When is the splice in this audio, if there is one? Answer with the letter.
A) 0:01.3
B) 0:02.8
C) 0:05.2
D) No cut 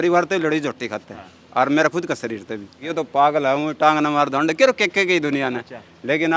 B